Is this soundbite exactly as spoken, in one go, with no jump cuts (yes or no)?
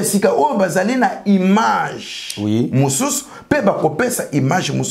yes